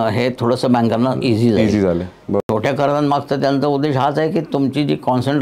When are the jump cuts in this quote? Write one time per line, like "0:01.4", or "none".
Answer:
0:02.4